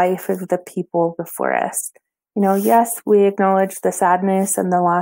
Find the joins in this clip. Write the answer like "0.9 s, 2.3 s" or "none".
3.0 s

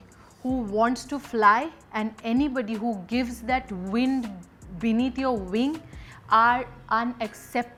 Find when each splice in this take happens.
none

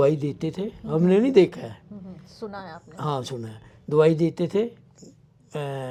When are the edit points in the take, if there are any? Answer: none

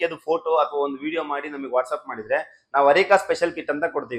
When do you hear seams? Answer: none

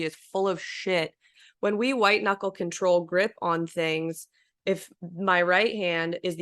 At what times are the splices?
1.3 s

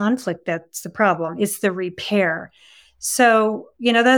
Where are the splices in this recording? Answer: none

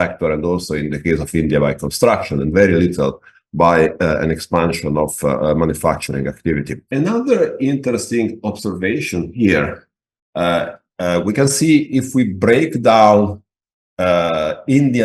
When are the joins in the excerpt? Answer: 6.8 s

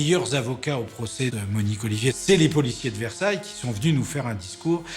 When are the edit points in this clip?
2.2 s

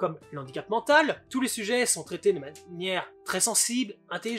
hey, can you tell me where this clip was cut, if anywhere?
1.2 s

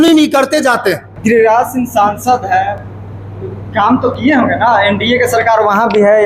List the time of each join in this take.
1.1 s

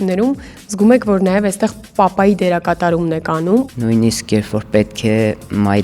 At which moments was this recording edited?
3.7 s

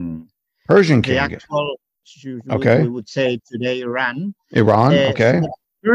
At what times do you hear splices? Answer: 2.0 s

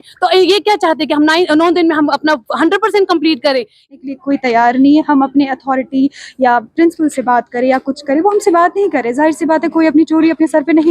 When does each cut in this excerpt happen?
3.9 s

